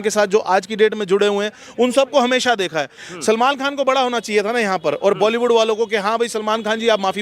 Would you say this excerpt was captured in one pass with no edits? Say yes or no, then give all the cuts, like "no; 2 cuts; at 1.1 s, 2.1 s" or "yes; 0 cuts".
no; 1 cut; at 3.0 s